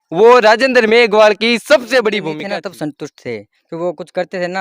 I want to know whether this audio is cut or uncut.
cut